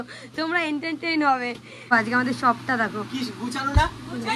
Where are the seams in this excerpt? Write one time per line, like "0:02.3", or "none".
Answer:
0:01.9

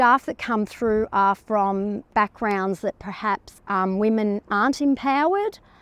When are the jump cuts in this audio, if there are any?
0:02.1
0:03.5

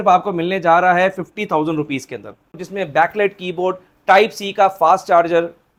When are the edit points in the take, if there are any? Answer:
none

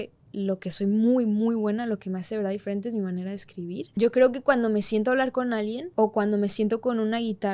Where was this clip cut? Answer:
0:03.9
0:05.8

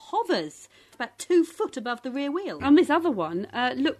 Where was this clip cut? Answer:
0:01.0
0:02.5

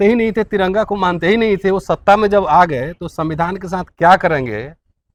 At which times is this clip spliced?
none

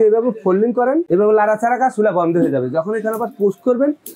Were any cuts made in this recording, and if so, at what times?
0:01.1

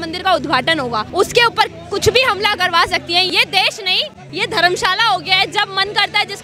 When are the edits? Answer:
0:01.1
0:03.3
0:04.2

